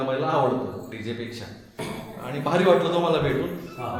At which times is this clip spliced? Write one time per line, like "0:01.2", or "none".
0:01.8